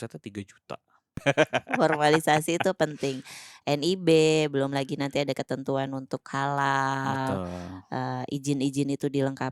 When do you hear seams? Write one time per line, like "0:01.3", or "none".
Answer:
0:01.2